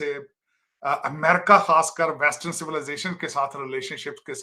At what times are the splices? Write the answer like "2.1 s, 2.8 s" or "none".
none

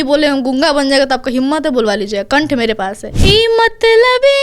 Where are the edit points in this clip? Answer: 3.1 s

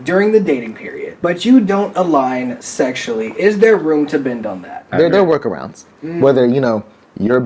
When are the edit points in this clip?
1.1 s, 4.8 s

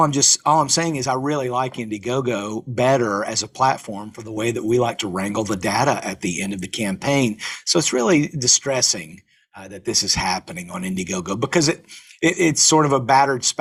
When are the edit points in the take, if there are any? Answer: none

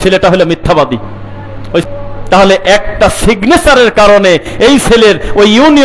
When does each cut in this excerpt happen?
1.8 s

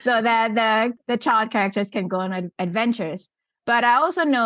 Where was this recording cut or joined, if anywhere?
0.9 s, 2.5 s

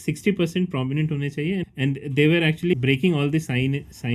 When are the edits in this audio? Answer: 1.7 s, 2.7 s

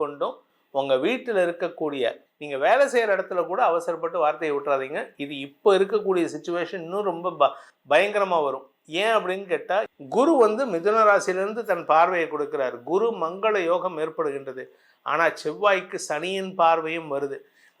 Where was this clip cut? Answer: 2.2 s, 9.9 s

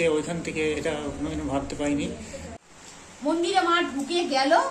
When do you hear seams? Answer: 2.6 s

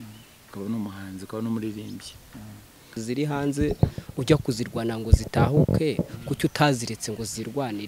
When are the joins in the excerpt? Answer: 3.0 s

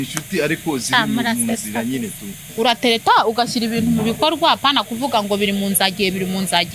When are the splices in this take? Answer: 2.4 s

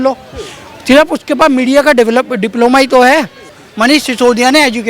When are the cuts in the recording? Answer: 3.6 s

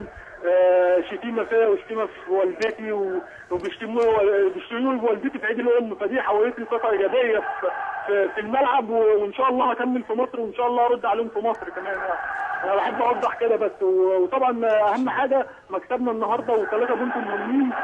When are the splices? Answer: 13.6 s

